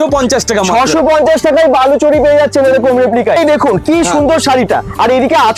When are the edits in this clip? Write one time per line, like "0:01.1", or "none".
0:03.4